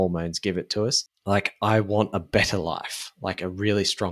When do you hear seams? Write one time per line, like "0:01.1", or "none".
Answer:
0:01.1